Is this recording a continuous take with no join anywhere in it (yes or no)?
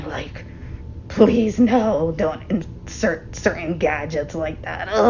yes